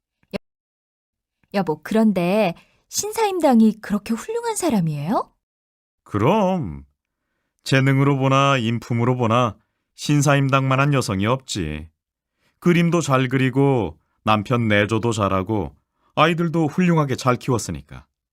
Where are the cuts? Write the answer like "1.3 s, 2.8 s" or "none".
none